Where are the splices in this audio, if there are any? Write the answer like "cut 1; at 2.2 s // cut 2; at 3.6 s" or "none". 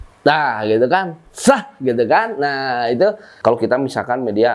cut 1; at 3.3 s